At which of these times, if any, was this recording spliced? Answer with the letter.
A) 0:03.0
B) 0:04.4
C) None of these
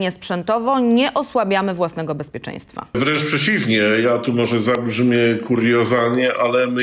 A